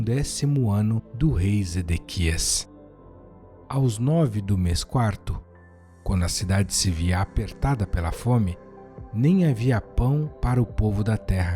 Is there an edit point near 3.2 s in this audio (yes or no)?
no